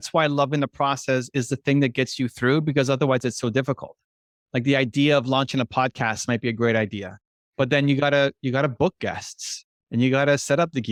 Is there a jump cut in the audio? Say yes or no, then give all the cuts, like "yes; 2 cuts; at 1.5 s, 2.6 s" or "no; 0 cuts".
no; 0 cuts